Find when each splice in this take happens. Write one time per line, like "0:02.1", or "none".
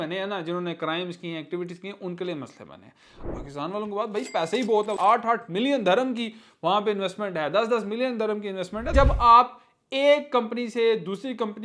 0:03.2
0:04.9
0:08.9